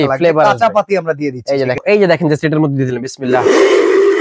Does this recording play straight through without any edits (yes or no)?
no